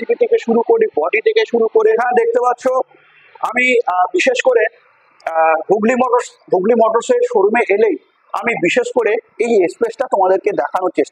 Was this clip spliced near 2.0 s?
yes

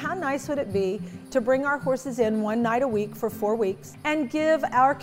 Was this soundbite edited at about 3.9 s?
yes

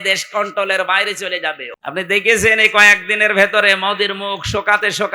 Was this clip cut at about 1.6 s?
yes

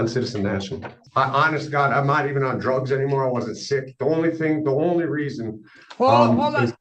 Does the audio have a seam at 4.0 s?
no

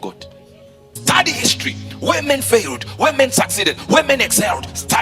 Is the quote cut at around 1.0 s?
yes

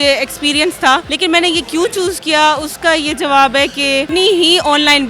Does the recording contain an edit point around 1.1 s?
yes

